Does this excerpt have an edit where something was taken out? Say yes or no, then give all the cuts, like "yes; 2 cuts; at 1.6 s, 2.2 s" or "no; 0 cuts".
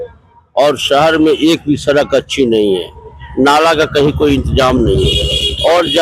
no; 0 cuts